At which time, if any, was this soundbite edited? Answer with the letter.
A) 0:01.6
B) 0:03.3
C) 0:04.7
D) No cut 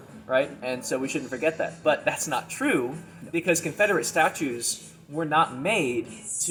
D